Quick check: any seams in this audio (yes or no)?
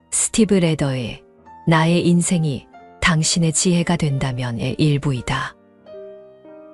yes